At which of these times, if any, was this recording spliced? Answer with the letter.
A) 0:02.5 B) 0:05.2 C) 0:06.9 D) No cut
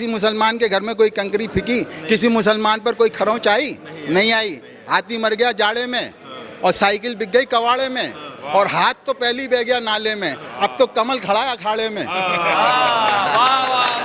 D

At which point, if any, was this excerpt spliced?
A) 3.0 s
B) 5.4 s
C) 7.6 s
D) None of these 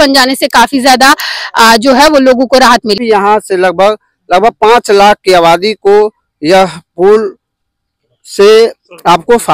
A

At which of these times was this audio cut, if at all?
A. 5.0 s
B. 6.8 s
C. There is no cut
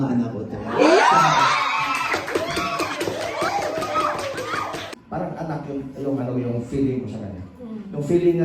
A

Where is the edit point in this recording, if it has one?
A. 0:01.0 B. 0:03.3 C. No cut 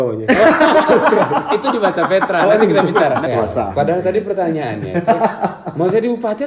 B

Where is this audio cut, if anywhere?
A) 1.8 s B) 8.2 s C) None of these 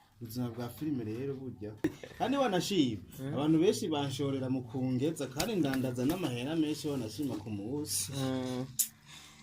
A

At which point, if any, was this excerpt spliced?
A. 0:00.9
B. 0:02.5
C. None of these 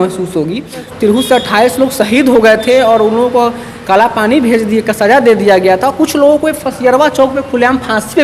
A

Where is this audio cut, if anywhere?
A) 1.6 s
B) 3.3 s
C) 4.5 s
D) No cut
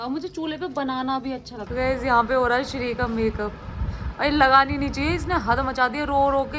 A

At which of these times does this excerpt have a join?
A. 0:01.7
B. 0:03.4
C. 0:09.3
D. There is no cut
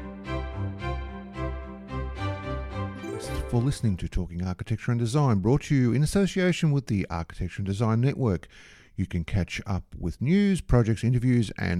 B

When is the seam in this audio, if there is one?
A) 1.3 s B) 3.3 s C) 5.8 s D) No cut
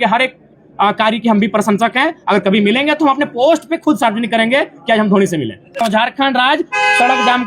C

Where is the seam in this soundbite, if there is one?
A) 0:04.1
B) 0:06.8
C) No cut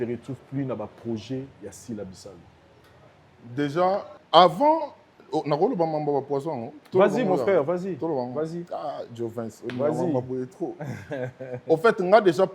A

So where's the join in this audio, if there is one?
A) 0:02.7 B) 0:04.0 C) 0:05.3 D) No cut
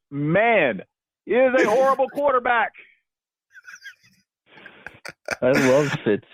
D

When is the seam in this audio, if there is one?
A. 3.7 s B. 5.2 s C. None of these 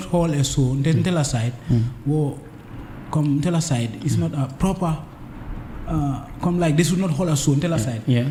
C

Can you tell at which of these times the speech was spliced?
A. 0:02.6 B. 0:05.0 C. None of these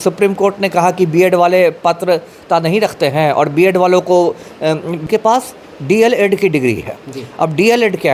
B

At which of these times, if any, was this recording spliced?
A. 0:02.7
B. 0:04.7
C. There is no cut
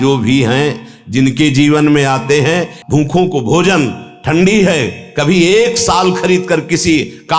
A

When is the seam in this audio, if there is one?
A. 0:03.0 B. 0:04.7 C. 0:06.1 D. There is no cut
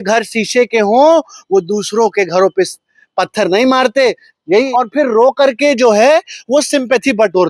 B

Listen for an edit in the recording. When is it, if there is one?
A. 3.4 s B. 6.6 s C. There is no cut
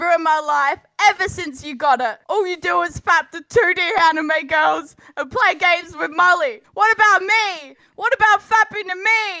B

